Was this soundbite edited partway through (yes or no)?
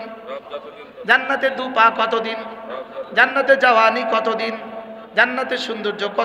no